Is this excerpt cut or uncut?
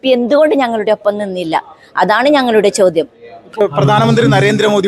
cut